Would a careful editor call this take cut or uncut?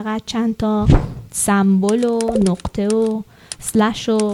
uncut